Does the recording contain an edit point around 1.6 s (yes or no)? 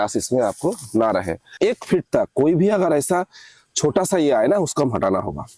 yes